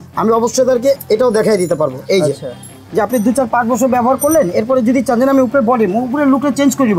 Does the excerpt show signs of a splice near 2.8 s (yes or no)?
yes